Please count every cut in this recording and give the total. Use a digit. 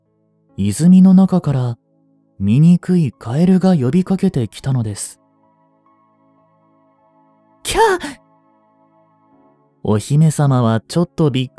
0